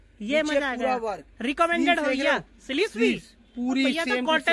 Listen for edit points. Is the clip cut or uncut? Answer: uncut